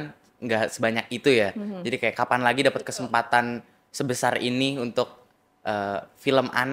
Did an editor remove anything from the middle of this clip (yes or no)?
no